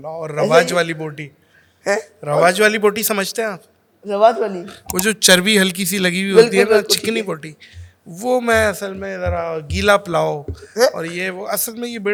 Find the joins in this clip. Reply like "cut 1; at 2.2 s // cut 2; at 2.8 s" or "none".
none